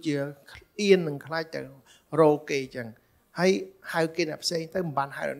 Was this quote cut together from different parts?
no; 0 cuts

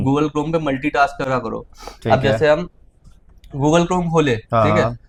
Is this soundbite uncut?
yes; 0 cuts

